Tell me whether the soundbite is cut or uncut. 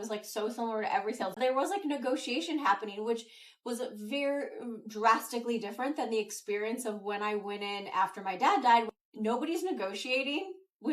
cut